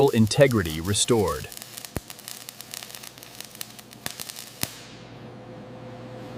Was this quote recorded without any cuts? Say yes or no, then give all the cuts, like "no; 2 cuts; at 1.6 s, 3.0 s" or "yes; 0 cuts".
yes; 0 cuts